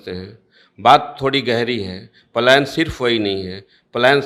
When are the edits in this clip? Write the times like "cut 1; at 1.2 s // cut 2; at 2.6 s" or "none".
none